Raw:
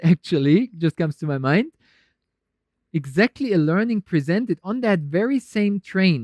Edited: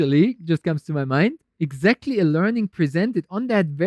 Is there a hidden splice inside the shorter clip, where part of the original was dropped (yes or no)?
yes